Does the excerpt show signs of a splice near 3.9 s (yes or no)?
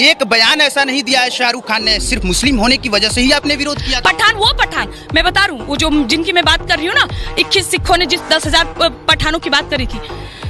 yes